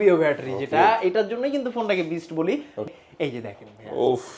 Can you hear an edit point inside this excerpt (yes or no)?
yes